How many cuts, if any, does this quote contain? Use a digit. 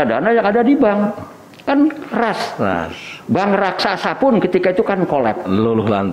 0